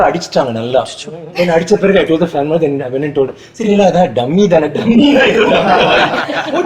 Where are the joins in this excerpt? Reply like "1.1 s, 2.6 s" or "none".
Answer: none